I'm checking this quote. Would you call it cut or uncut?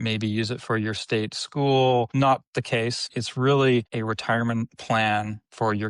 cut